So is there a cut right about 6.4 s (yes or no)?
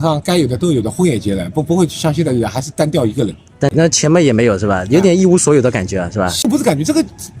yes